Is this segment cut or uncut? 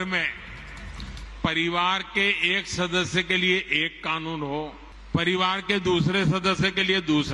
cut